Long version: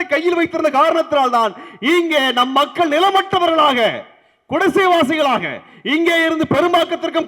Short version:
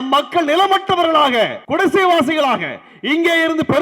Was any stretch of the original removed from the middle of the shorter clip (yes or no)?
yes